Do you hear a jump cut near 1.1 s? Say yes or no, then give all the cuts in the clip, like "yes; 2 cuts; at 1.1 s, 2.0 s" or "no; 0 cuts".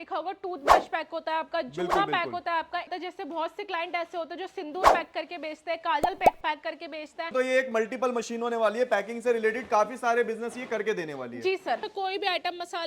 no; 3 cuts; at 2.9 s, 7.3 s, 11.9 s